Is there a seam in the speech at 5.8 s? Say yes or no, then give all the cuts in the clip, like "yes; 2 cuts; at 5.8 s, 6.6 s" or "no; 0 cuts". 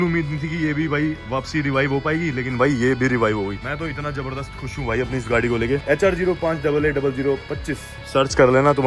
yes; 1 cut; at 5.8 s